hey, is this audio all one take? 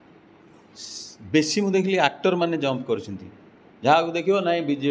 yes; 0 cuts

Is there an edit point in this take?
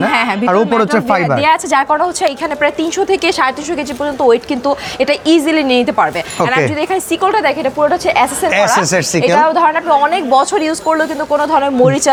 no; 0 cuts

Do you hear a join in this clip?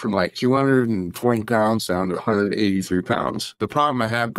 yes; 1 cut; at 3.5 s

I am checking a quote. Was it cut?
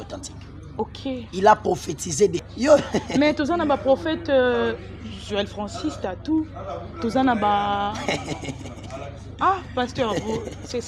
yes; 1 cut; at 2.4 s

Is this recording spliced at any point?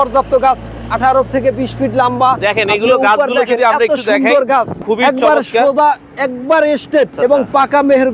yes; 2 cuts; at 4.8 s, 7.1 s

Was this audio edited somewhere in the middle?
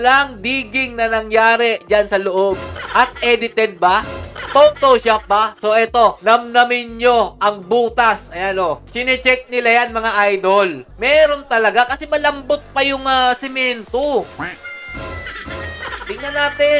no; 0 cuts

